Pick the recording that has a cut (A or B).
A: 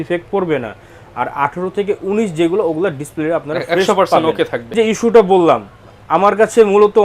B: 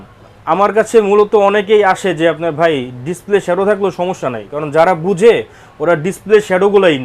A